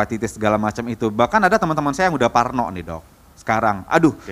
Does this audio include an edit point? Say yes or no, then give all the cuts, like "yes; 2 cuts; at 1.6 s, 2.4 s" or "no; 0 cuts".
no; 0 cuts